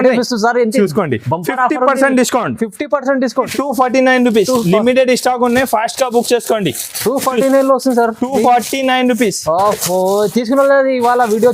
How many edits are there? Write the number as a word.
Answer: one